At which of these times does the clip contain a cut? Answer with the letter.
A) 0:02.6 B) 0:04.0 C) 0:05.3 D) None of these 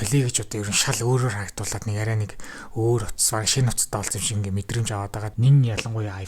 C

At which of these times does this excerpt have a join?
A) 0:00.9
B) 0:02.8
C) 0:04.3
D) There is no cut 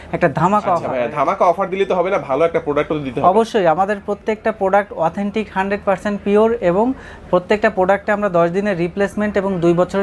A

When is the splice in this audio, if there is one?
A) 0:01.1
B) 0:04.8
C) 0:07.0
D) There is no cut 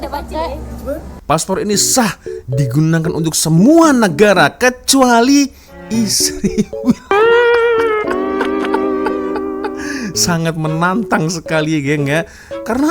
A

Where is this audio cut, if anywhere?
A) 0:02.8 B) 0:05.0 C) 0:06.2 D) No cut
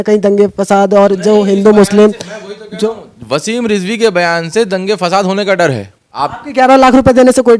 C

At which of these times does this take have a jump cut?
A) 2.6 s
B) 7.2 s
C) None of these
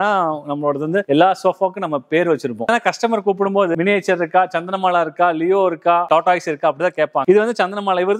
B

